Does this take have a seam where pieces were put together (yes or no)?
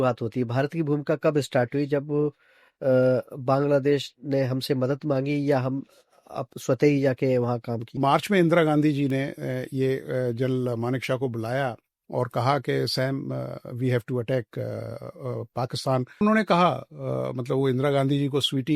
yes